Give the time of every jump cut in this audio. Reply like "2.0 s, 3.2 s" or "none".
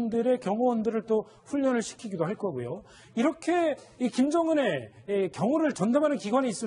none